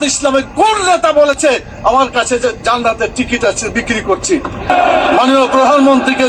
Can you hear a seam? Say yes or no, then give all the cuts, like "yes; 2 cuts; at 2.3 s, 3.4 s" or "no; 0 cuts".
yes; 1 cut; at 4.7 s